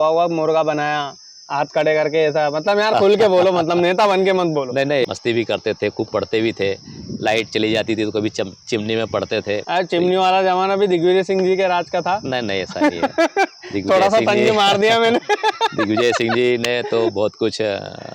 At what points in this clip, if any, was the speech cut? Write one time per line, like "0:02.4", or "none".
0:05.0
0:09.6

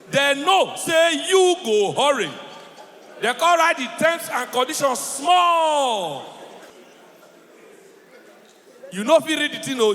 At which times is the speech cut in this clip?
0:06.7

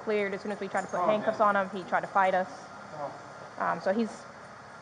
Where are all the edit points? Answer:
none

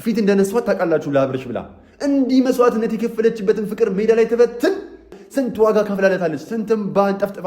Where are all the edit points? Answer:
0:05.2

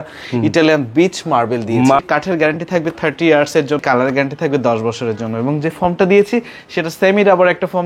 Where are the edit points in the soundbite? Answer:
0:02.0
0:03.8

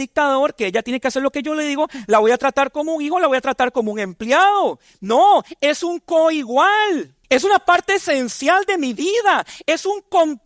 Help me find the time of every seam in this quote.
0:07.1

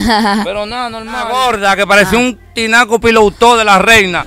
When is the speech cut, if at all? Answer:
0:01.3

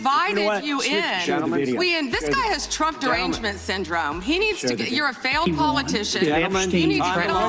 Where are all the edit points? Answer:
none

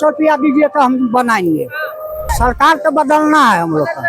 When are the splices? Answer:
0:02.3

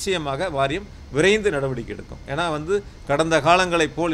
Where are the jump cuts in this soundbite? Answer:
none

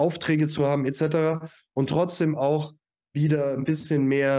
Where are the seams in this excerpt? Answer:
none

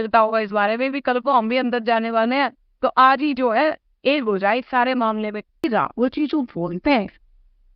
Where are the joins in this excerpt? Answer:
0:05.6

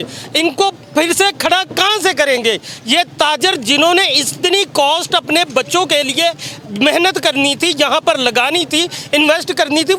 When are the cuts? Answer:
none

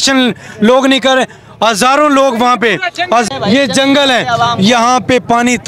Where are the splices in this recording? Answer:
0:03.3

